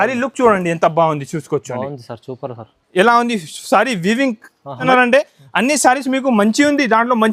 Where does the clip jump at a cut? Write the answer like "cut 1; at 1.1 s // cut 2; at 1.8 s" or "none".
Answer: cut 1; at 4.9 s